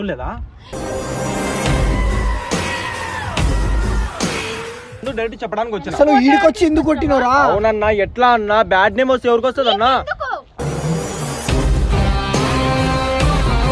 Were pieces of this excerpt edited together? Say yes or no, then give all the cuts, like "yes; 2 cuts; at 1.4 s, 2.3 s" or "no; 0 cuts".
yes; 1 cut; at 5.0 s